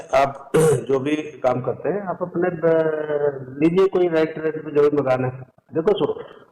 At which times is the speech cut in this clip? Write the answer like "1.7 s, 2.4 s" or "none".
5.6 s

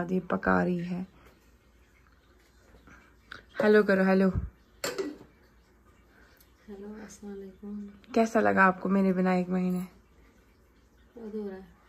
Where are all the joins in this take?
none

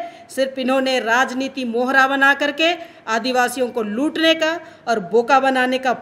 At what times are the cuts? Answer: none

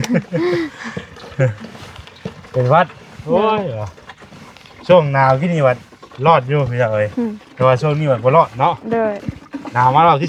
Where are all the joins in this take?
none

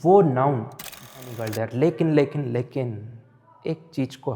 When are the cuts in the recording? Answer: 1.1 s

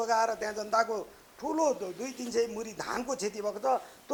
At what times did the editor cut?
none

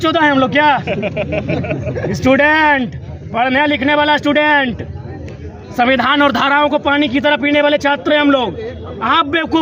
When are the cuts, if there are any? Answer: none

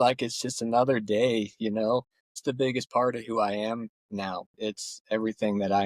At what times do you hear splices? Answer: 2.4 s, 4.5 s

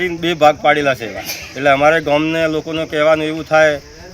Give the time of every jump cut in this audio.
none

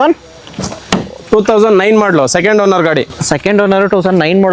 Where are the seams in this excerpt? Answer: none

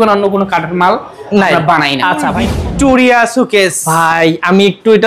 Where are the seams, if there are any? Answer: 2.5 s

